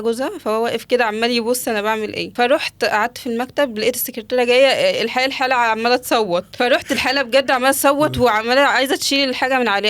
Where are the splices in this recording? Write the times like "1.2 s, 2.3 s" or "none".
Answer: 2.2 s, 6.5 s